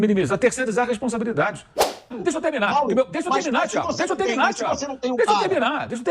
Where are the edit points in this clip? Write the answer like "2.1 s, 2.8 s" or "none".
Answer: 2.1 s